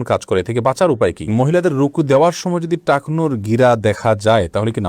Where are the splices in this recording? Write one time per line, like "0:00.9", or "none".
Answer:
0:01.3